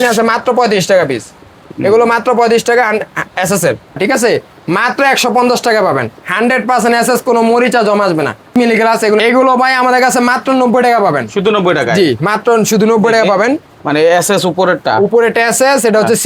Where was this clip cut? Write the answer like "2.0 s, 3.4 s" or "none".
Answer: 4.0 s, 8.5 s